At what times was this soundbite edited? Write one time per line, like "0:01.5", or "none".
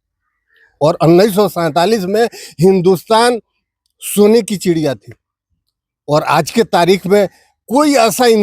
none

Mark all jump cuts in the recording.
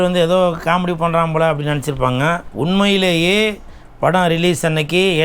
0:02.5

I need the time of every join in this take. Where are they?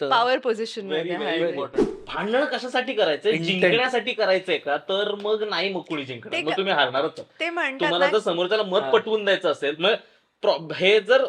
0:01.9

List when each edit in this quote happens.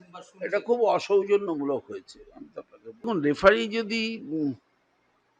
0:03.0

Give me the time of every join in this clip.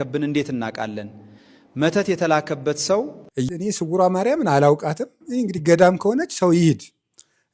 0:03.5

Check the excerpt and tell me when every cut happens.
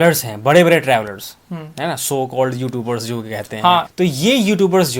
0:03.9

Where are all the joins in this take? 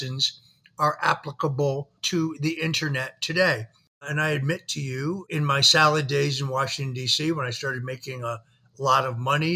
0:02.0
0:04.1
0:05.2

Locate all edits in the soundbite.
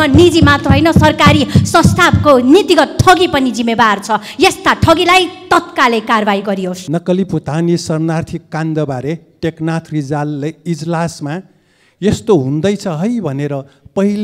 0:06.8

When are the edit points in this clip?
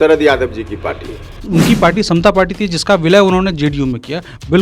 0:01.4

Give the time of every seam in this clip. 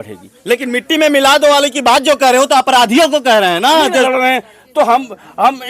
0:04.1

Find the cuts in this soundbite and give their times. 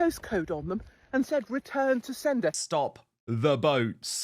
0:02.6

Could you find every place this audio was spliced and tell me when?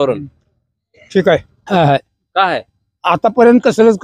0:01.5

